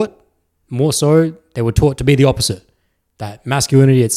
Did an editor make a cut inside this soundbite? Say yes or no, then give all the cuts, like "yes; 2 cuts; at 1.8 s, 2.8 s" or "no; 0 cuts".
no; 0 cuts